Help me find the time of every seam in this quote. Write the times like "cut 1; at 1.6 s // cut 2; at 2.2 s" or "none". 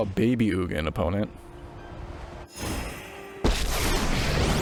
none